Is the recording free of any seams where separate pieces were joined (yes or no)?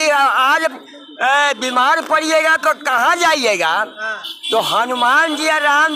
yes